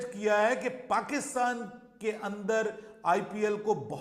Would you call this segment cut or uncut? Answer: uncut